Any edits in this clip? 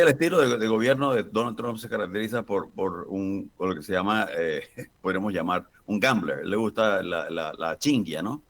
no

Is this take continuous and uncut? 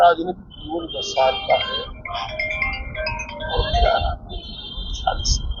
yes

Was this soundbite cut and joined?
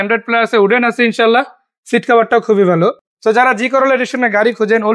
no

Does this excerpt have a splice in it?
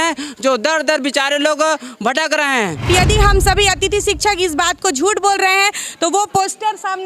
yes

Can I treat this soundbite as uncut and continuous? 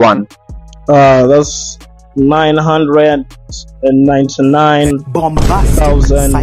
yes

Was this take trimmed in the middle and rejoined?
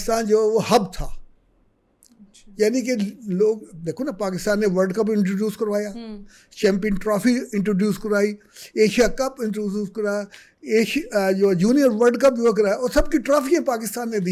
no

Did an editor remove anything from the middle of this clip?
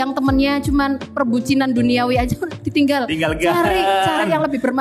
no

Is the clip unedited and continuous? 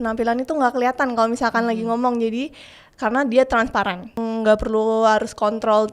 no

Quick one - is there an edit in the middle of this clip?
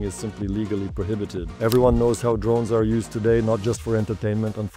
yes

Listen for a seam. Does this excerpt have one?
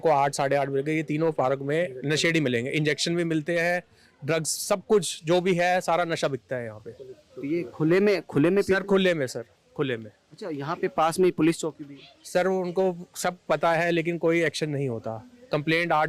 no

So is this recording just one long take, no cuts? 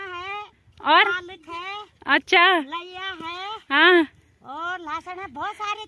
yes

